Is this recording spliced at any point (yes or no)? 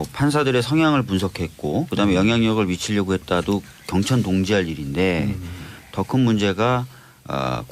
yes